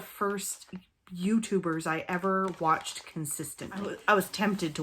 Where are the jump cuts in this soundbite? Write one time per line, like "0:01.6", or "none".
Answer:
0:03.9